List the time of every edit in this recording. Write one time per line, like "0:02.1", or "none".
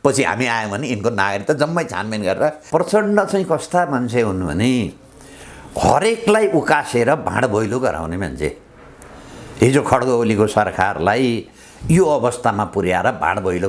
0:02.6